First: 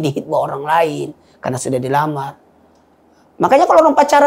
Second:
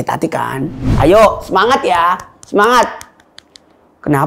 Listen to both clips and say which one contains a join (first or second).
second